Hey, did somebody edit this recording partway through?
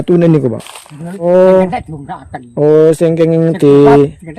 yes; 1 cut; at 1.2 s

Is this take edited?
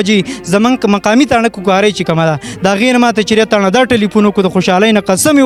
no; 0 cuts

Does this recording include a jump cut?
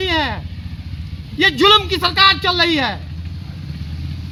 no; 0 cuts

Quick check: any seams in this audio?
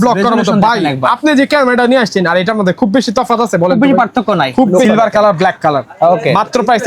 yes; 1 cut; at 4.8 s

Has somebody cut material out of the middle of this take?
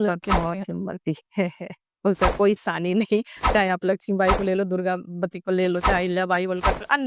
no; 0 cuts

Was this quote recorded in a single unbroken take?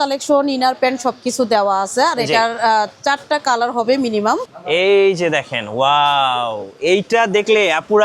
no; 1 cut; at 4.4 s

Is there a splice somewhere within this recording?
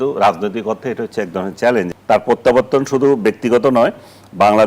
yes; 1 cut; at 1.9 s

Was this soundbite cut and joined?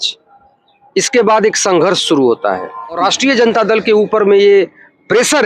yes; 1 cut; at 3.0 s

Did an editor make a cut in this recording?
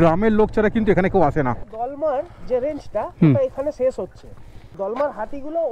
yes; 2 cuts; at 1.7 s, 4.5 s

